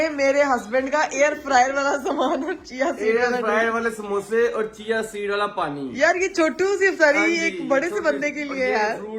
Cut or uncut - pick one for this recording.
uncut